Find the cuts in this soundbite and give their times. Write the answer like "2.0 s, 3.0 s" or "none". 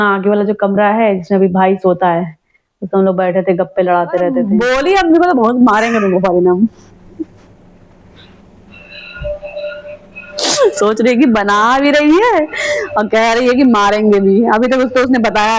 4.4 s

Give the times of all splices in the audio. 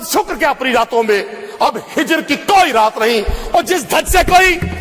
none

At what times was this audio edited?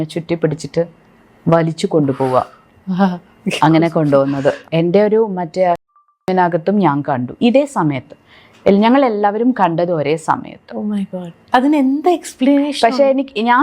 6.3 s

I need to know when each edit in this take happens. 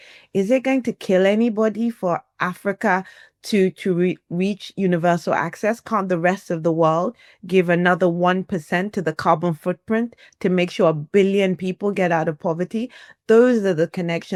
none

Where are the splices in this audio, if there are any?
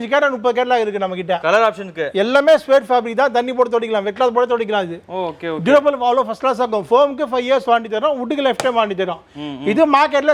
none

